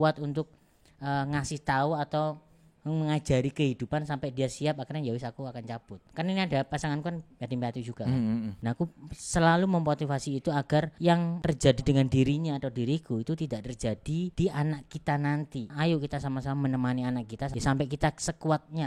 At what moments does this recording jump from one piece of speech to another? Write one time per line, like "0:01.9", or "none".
0:06.0
0:08.5
0:11.2
0:14.3
0:15.7
0:17.5